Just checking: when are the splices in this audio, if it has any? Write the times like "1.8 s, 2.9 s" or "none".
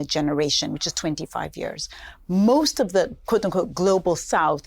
3.2 s